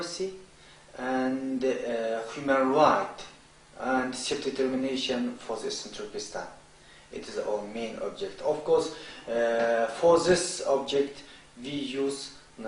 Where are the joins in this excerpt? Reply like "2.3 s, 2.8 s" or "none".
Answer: none